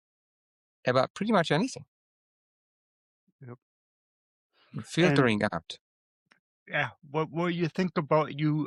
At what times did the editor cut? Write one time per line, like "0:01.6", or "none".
none